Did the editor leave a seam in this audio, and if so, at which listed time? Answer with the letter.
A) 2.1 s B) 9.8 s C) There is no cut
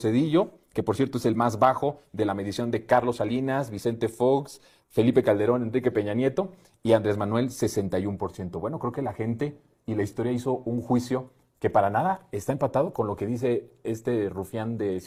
C